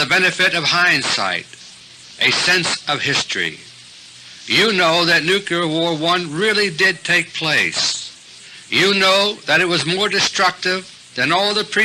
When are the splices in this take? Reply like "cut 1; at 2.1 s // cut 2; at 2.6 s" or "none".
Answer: cut 1; at 8.3 s